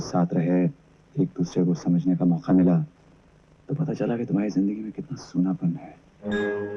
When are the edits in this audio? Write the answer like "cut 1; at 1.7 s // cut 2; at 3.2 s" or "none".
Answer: none

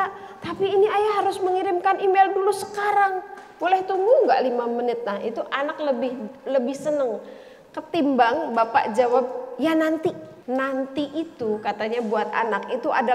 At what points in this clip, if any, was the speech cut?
cut 1; at 10.3 s

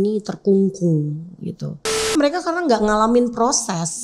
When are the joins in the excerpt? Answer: cut 1; at 2.1 s

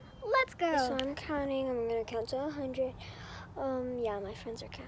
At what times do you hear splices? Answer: cut 1; at 0.9 s

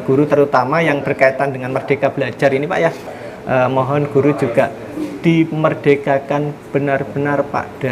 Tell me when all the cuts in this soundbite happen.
cut 1; at 3.0 s

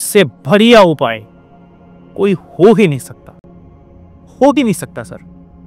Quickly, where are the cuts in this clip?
none

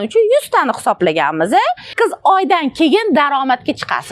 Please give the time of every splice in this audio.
cut 1; at 1.9 s

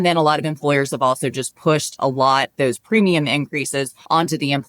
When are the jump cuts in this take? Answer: cut 1; at 2.5 s

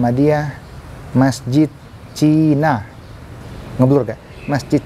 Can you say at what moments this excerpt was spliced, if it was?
none

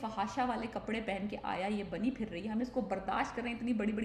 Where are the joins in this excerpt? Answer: none

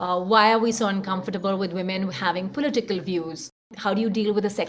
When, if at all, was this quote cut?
cut 1; at 3.7 s

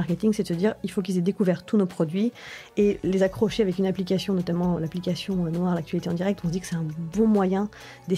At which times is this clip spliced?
none

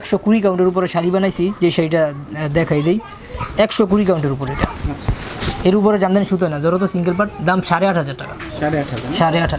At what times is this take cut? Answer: none

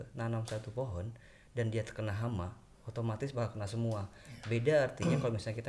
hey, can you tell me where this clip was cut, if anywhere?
none

